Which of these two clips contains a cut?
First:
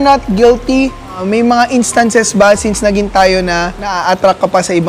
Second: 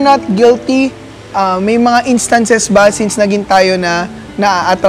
first; 2 cuts; at 1.2 s, 3.8 s

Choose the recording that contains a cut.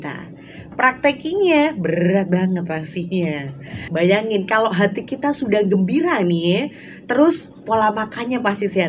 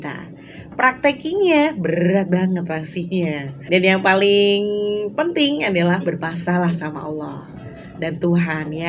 first; 1 cut; at 3.6 s

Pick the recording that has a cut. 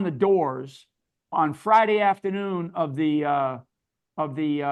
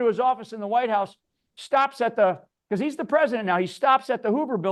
first; 1 cut; at 1.3 s

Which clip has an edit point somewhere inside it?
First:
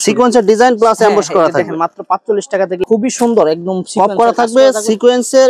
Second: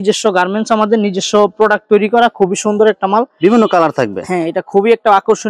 first; 1 cut; at 2.8 s

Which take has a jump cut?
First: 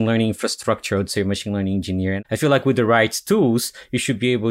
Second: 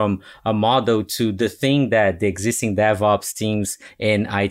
first; 1 cut; at 2.2 s

